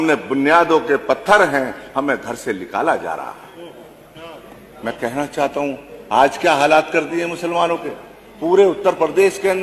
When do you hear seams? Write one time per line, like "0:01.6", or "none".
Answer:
none